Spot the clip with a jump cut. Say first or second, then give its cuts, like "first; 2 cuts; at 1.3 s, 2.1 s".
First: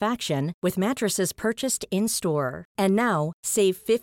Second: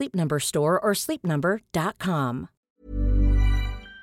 second; 1 cut; at 2.8 s